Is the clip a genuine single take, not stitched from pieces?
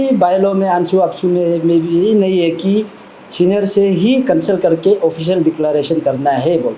yes; 0 cuts

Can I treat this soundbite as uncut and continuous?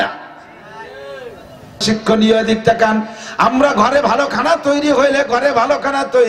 no; 1 cut; at 1.8 s

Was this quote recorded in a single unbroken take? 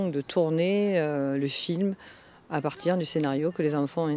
no; 1 cut; at 2.4 s

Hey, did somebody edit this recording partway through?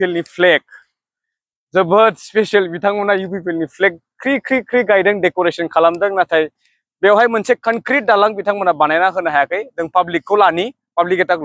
no; 0 cuts

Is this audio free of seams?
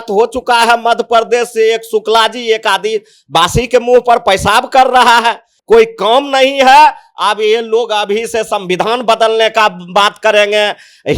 no; 1 cut; at 5.5 s

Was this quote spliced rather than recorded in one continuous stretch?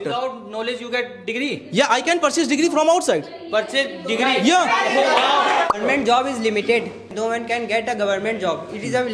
yes; 2 cuts; at 5.7 s, 7.1 s

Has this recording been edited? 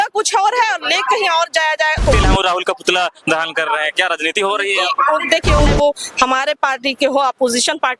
yes; 2 cuts; at 2.1 s, 5.7 s

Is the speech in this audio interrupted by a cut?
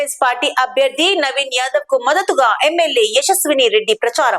no; 0 cuts

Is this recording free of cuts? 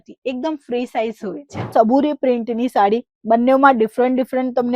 no; 1 cut; at 1.7 s

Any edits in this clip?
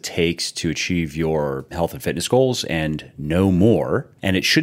yes; 1 cut; at 1.6 s

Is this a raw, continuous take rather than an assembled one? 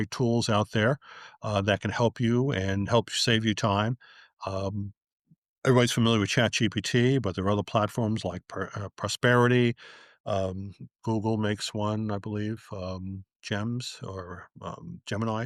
yes; 0 cuts

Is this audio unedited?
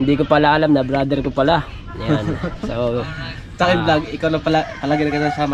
yes; 0 cuts

